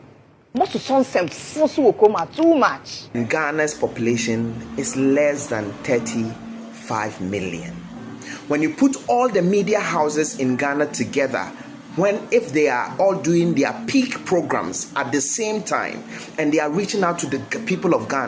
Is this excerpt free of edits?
no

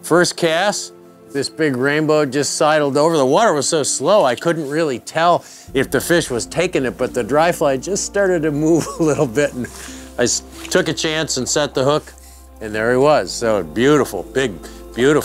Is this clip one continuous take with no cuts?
yes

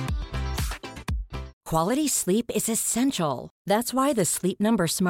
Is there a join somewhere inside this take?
yes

